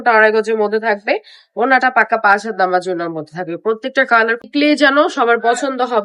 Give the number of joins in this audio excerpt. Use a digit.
1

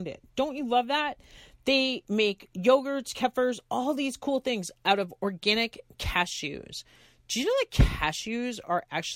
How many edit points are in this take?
0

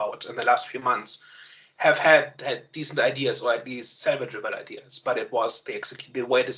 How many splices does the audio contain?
0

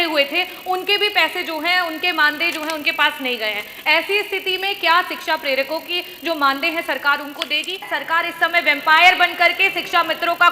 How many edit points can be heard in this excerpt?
1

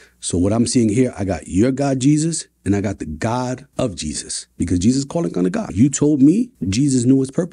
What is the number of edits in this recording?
1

